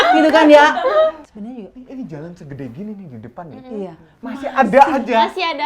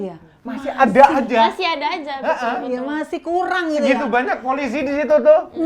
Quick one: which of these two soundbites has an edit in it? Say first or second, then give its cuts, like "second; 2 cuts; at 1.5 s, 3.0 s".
first; 1 cut; at 1.2 s